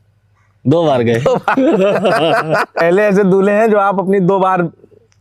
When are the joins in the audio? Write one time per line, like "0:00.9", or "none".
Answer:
0:02.8